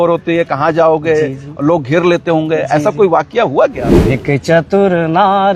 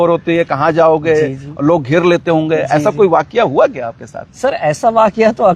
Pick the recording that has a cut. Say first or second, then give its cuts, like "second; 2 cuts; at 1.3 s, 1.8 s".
first; 1 cut; at 3.9 s